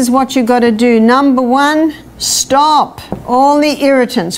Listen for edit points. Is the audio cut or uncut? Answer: uncut